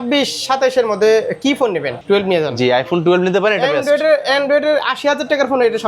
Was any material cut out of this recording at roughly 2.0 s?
yes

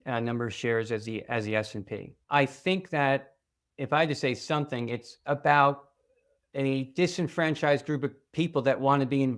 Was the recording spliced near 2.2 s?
yes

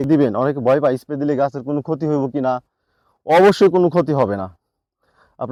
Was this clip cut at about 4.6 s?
no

